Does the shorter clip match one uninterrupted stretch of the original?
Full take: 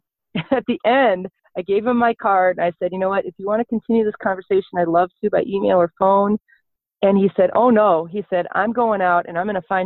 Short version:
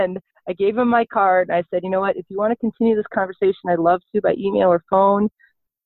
yes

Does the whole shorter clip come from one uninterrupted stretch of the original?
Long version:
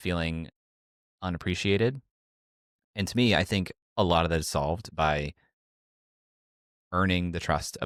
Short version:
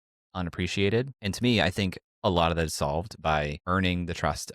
no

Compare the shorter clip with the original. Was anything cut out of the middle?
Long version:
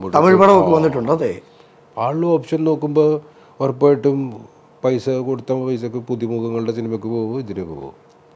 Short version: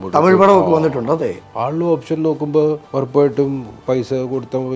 yes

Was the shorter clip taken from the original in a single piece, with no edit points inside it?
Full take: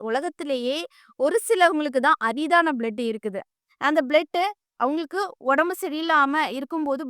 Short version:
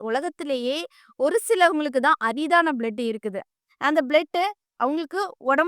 yes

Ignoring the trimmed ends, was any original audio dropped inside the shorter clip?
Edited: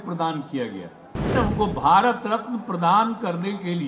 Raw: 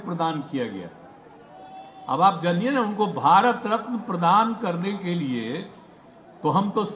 yes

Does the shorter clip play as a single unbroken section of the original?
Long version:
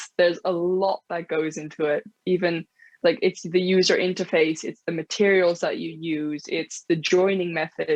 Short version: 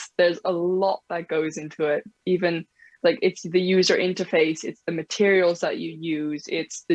yes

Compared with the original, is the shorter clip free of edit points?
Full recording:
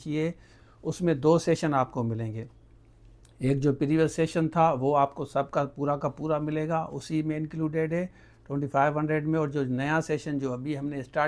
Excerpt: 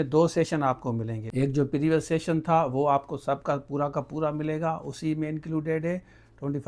no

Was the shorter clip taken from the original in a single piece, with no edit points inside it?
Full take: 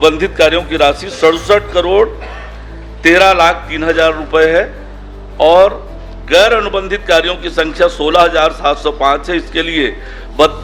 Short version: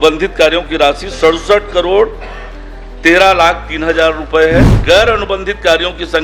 no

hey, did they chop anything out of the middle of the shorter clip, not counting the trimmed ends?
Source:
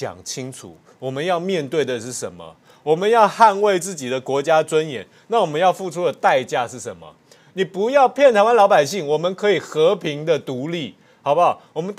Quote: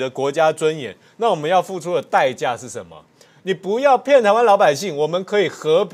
no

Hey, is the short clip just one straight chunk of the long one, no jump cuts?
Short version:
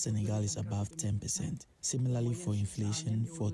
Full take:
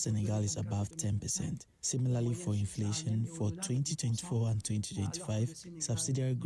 yes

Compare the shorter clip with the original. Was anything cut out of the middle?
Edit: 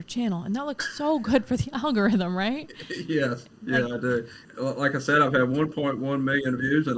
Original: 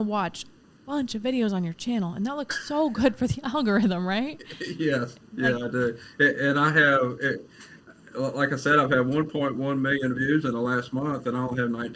yes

